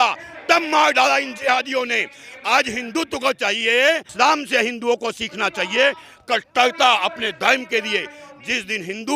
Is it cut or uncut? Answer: cut